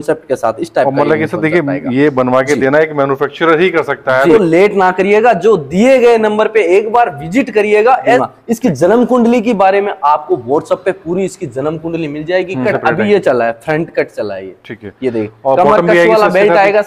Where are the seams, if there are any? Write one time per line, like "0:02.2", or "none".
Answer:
0:04.3
0:08.2
0:12.7